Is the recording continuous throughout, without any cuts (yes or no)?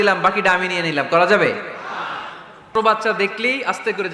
no